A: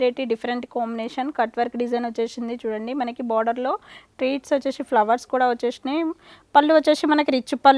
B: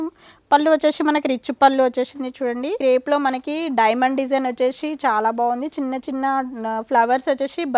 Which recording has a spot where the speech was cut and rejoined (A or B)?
B